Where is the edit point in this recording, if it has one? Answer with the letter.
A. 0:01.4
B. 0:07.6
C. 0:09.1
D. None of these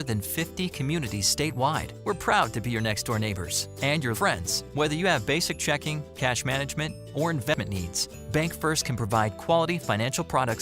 B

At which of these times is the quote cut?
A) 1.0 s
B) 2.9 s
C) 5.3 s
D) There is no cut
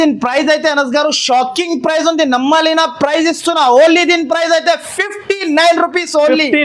D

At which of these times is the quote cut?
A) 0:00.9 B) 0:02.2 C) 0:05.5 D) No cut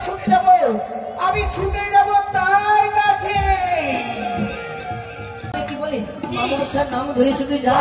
C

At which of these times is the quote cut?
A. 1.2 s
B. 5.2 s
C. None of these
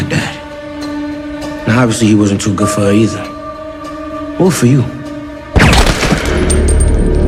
C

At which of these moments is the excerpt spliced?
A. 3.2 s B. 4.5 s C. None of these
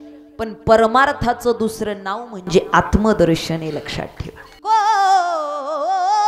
B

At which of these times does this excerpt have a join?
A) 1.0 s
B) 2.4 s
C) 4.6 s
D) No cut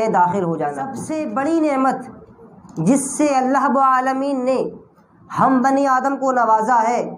A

